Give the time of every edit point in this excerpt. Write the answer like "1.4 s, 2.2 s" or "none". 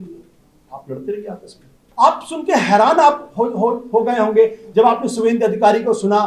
1.8 s